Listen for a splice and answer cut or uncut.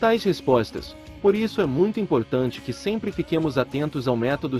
uncut